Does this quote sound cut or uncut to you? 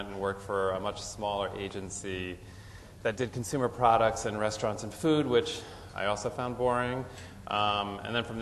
uncut